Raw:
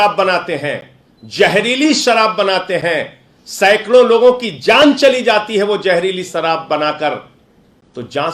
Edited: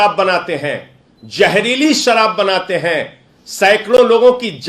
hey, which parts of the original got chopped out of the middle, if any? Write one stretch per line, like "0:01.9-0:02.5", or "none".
none